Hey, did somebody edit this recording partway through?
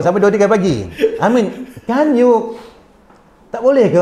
no; 0 cuts

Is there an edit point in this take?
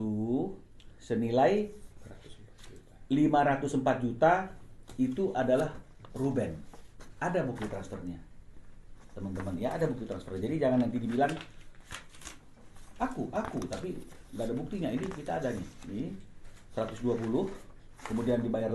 no; 0 cuts

